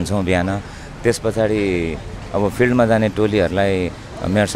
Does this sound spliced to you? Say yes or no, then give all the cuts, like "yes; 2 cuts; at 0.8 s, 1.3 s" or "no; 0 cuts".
no; 0 cuts